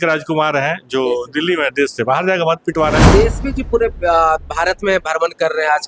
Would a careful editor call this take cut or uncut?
cut